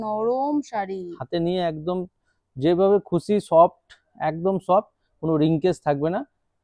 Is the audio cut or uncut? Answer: uncut